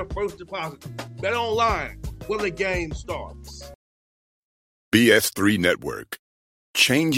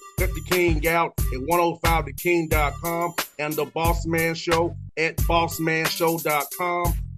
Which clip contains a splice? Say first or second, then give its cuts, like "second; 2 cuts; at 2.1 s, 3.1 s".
first; 1 cut; at 3.7 s